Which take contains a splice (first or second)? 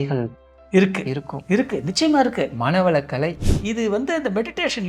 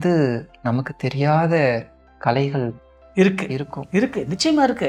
first